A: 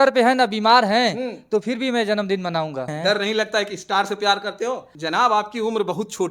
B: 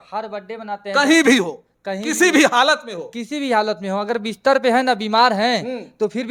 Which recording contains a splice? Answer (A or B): A